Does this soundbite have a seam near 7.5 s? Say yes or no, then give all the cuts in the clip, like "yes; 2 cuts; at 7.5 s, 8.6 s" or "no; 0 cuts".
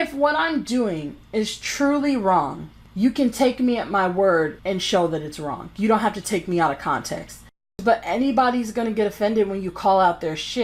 yes; 1 cut; at 7.5 s